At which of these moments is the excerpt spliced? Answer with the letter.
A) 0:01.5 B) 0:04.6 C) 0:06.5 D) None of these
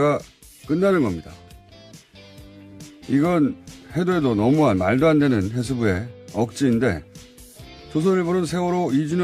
C